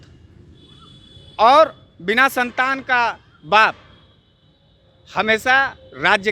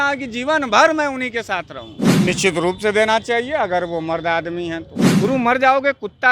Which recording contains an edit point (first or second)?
second